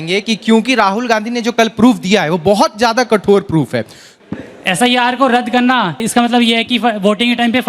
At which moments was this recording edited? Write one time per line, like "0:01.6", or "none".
0:04.1
0:06.0